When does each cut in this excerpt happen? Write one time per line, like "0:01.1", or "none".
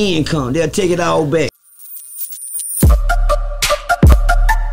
0:01.5